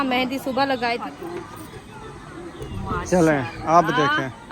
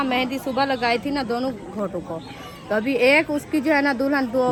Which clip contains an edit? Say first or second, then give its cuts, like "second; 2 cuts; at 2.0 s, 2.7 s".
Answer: first; 1 cut; at 1.0 s